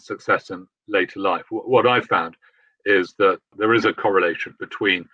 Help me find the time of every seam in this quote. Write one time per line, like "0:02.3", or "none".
0:03.5